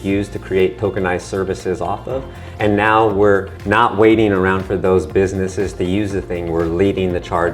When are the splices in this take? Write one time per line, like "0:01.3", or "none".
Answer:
0:03.6